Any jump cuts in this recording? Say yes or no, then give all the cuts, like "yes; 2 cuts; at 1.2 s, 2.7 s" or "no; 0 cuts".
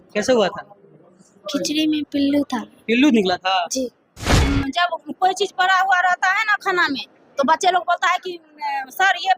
yes; 1 cut; at 4.3 s